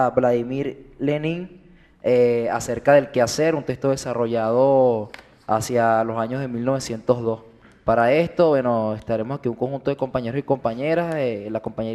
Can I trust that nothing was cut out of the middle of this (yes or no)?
yes